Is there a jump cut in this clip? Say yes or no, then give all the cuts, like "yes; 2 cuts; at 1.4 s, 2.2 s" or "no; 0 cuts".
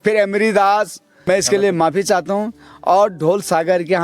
yes; 1 cut; at 1.3 s